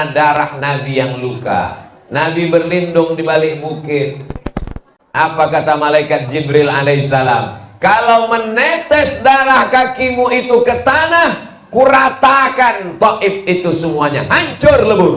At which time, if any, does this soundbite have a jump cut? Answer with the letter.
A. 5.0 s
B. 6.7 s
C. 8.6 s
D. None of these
D